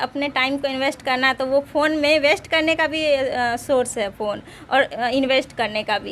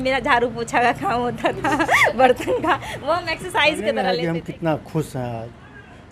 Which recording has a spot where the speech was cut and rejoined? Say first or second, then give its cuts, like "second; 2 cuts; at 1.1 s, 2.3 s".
second; 1 cut; at 4.2 s